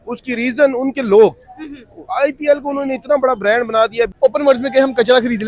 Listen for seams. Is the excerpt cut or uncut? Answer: cut